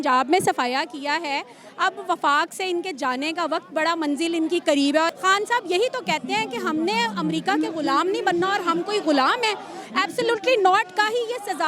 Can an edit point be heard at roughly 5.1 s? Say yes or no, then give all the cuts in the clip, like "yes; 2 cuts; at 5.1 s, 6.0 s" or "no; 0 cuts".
yes; 1 cut; at 5.1 s